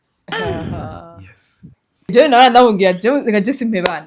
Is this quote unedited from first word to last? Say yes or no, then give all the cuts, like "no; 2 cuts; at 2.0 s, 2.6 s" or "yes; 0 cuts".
no; 1 cut; at 2.1 s